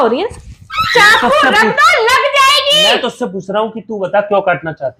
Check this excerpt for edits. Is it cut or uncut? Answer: uncut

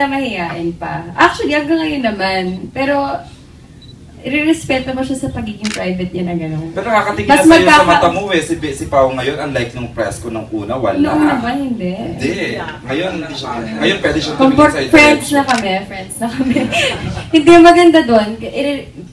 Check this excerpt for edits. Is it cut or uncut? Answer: uncut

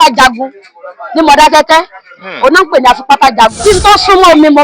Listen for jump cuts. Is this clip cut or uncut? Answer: cut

